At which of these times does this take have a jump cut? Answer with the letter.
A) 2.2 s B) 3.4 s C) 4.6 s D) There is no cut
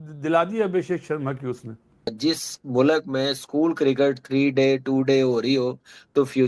A